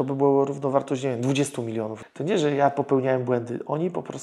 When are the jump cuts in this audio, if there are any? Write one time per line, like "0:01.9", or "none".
0:02.0